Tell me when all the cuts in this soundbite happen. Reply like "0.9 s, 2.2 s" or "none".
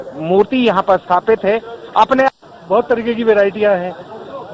2.3 s